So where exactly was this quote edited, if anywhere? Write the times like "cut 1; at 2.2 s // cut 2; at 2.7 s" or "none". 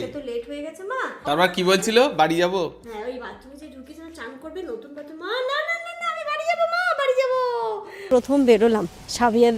cut 1; at 1.2 s // cut 2; at 8.1 s